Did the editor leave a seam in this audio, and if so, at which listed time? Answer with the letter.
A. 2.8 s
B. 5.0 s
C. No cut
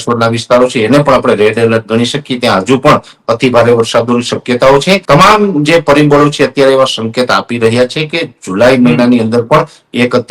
B